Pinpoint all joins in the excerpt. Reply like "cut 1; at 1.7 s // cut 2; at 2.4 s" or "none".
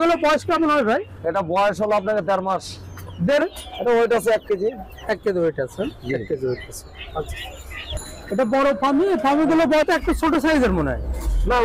cut 1; at 3.4 s // cut 2; at 10.0 s